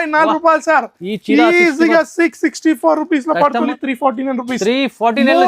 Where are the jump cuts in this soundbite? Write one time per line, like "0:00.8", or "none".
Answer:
0:03.7